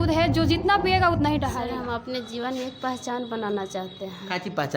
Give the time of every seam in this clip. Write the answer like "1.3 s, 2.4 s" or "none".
1.5 s